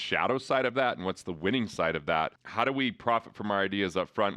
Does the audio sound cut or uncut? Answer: cut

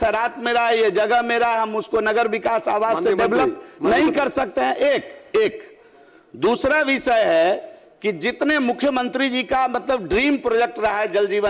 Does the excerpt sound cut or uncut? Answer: uncut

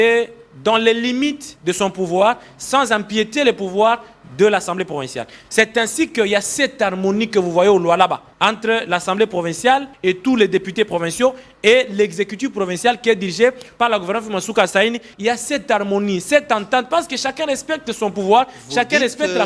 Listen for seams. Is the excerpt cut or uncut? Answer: cut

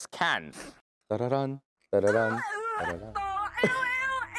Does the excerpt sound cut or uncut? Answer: cut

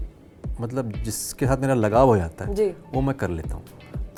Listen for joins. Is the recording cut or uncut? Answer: uncut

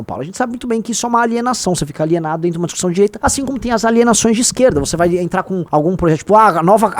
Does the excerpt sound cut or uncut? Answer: cut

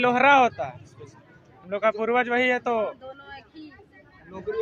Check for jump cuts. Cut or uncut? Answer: uncut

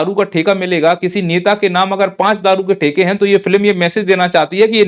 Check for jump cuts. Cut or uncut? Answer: uncut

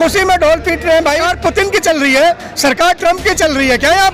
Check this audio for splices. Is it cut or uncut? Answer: cut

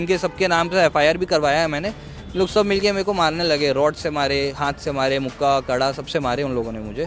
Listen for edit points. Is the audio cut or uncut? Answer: uncut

